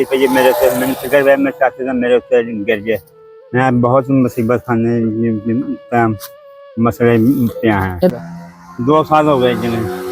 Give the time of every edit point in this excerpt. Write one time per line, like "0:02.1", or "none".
0:08.1